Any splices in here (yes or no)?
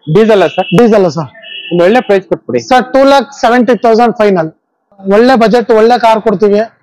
yes